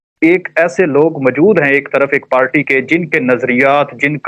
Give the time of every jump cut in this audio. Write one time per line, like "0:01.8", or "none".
none